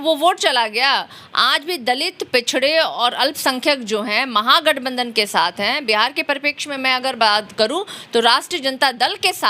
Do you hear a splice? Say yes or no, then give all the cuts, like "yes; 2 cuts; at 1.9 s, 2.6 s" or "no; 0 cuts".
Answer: no; 0 cuts